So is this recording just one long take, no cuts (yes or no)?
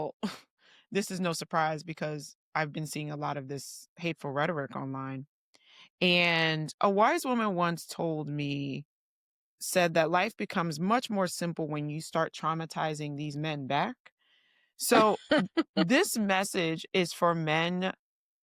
yes